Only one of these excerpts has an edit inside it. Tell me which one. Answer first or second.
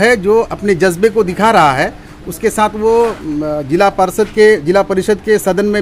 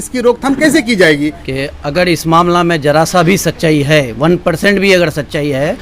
second